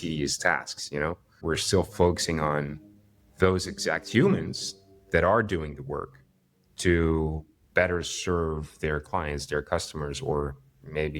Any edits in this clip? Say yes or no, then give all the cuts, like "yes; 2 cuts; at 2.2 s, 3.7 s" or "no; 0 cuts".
yes; 1 cut; at 1.3 s